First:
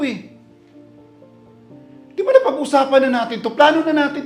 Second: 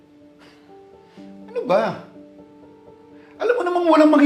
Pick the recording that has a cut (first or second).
second